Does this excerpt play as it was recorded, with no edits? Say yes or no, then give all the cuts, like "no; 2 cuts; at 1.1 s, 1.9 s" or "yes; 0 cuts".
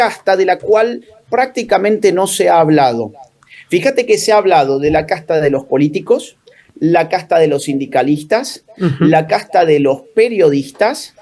yes; 0 cuts